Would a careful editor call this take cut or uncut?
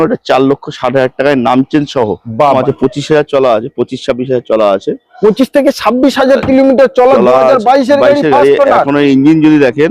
cut